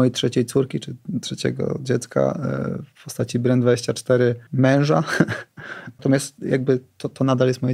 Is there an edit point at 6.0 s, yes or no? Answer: yes